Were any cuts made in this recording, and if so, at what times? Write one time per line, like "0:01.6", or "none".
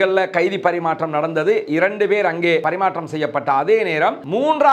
none